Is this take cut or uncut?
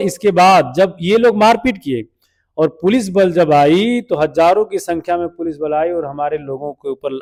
uncut